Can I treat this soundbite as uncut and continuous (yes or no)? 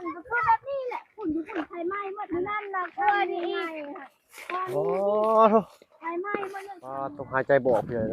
no